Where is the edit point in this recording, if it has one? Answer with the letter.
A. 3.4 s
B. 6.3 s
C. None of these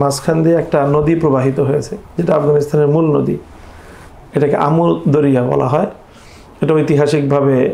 C